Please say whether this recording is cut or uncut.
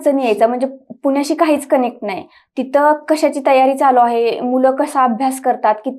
uncut